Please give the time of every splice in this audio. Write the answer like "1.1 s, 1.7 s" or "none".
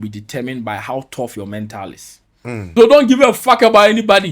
2.7 s